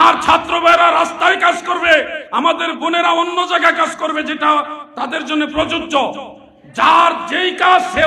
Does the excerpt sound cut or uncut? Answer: uncut